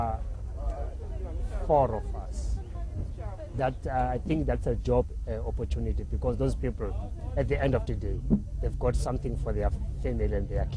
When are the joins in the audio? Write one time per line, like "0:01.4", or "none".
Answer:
0:07.7